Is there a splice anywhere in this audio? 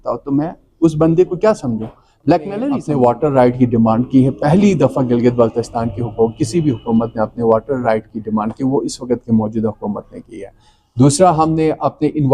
yes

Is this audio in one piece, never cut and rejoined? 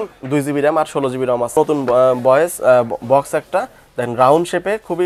no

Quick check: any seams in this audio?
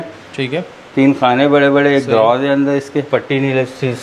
yes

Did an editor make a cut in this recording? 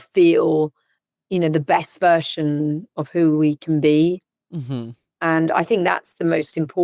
yes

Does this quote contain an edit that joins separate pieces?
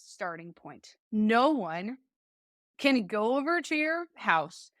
yes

